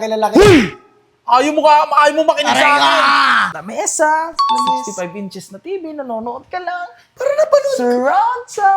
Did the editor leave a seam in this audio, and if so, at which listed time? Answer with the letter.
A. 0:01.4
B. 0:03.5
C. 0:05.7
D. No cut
B